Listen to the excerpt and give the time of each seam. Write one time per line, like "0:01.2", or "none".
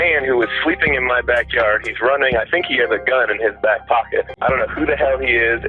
0:04.3